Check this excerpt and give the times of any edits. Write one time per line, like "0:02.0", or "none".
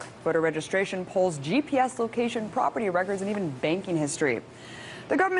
0:02.2

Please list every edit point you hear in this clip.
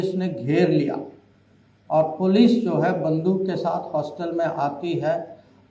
none

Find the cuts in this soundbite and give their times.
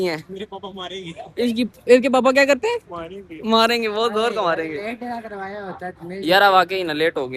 none

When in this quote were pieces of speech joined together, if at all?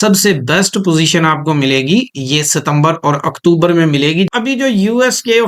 0:04.3

